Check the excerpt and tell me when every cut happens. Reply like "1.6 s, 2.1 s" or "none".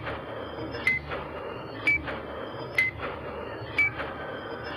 none